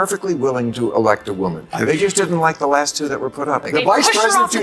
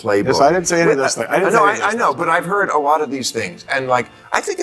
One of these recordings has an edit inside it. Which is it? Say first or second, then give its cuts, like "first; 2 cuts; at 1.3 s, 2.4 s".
first; 1 cut; at 3.7 s